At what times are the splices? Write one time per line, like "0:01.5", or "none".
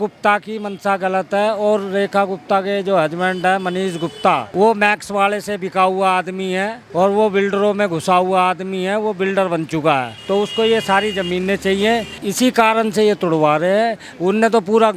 0:04.5
0:06.8
0:10.2
0:12.1